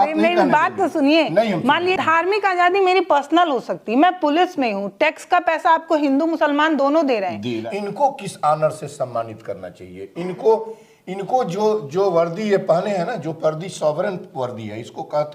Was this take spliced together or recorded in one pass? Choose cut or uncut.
cut